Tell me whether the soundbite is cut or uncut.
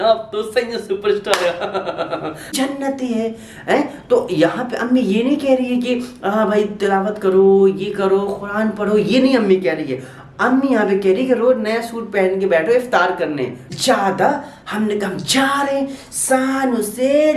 cut